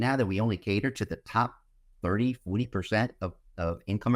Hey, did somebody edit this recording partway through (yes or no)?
no